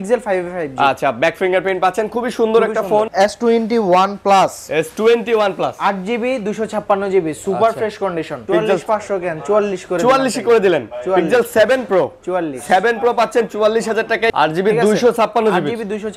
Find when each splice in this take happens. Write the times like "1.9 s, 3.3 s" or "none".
3.1 s, 8.4 s, 14.3 s